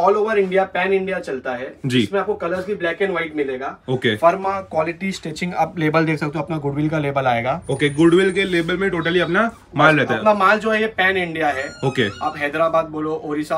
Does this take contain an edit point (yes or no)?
no